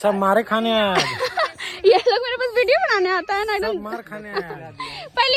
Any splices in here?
no; 0 cuts

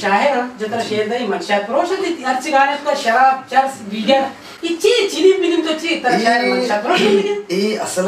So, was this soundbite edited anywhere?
no; 0 cuts

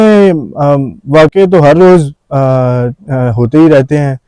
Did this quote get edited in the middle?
no; 0 cuts

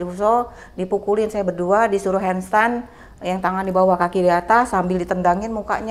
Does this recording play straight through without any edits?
yes; 0 cuts

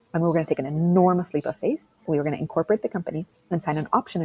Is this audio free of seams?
no; 1 cut; at 2.0 s

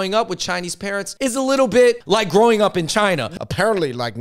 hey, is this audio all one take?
no; 3 cuts; at 1.1 s, 2.0 s, 3.2 s

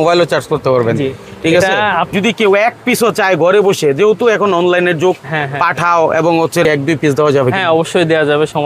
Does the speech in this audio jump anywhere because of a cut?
yes; 2 cuts; at 2.1 s, 6.7 s

